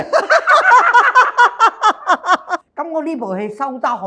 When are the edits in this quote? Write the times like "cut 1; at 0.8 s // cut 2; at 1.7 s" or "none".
cut 1; at 2.7 s